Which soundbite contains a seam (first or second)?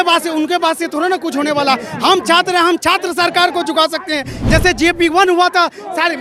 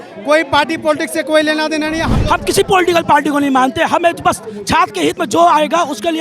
second